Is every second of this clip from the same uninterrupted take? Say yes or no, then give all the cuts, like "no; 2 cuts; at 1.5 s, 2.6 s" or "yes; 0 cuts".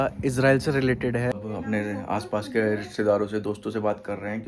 no; 1 cut; at 1.4 s